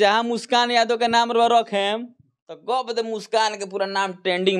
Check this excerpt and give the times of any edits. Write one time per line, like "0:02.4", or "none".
none